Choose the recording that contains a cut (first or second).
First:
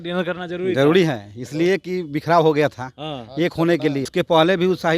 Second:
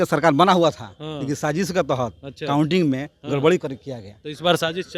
first